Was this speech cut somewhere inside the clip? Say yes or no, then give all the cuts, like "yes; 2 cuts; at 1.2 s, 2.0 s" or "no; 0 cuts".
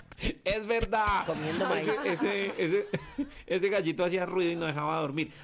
yes; 1 cut; at 2.4 s